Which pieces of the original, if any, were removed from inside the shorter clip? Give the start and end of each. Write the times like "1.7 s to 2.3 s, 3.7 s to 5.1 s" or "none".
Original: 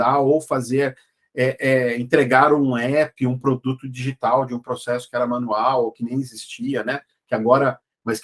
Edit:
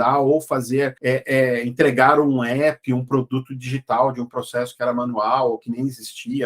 1.0 s to 1.3 s